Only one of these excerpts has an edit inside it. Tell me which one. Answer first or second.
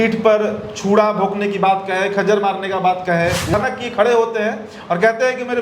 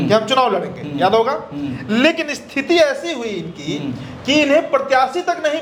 first